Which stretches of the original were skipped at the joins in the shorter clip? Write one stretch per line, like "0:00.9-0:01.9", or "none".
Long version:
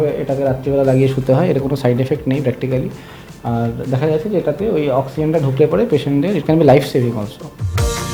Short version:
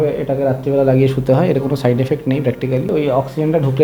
0:02.9-0:04.7